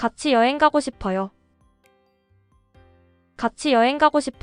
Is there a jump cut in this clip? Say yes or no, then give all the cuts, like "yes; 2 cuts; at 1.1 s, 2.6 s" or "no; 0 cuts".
yes; 2 cuts; at 1.3 s, 3.3 s